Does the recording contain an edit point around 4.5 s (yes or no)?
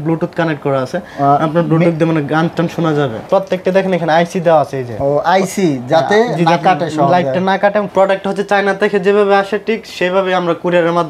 no